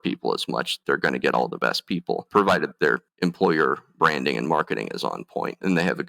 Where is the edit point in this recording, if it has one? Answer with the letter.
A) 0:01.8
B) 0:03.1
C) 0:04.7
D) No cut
B